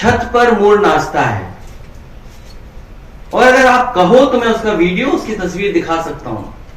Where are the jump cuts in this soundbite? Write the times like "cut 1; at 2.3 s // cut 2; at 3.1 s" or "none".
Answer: none

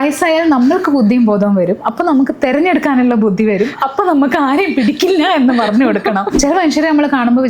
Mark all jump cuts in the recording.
cut 1; at 6.3 s

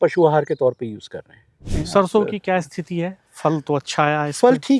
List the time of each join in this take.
cut 1; at 1.8 s

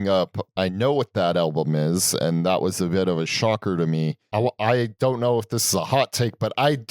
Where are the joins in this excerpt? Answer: cut 1; at 4.2 s

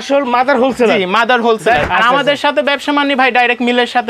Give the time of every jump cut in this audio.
cut 1; at 1.8 s

